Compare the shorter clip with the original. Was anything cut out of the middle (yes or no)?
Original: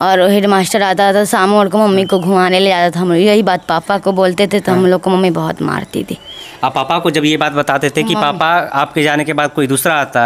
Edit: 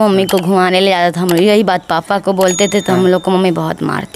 no